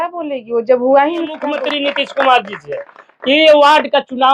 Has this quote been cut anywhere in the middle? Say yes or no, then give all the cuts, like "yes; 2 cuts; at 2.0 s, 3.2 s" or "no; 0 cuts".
yes; 1 cut; at 1.5 s